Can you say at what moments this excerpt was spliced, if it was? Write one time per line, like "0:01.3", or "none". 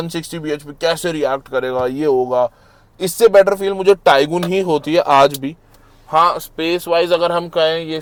none